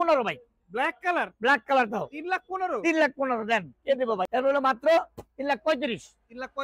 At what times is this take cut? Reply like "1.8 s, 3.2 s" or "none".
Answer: 4.3 s